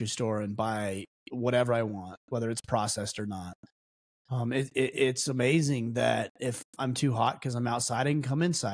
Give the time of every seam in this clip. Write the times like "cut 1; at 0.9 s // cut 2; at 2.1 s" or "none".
none